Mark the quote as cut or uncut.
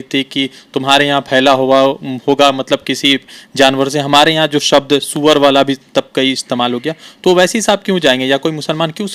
uncut